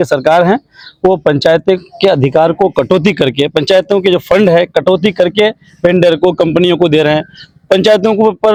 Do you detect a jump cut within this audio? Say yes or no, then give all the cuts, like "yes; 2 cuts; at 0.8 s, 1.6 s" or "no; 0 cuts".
no; 0 cuts